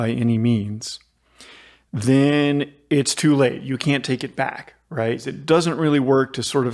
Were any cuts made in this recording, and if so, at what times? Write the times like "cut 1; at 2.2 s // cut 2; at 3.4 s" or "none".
cut 1; at 5.3 s